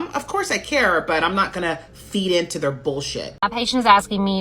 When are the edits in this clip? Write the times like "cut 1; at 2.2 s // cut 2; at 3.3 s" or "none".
cut 1; at 3.4 s